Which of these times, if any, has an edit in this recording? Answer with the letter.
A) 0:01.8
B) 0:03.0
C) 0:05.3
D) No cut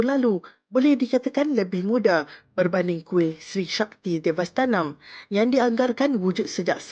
D